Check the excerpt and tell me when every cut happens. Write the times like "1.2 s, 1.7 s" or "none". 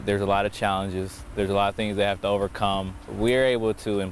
3.0 s